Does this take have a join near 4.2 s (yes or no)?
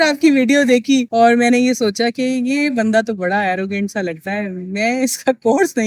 no